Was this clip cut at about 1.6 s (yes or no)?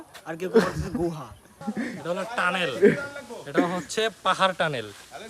yes